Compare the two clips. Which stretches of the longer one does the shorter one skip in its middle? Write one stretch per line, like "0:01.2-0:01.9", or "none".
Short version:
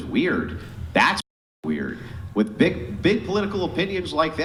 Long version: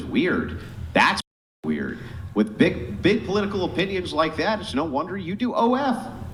none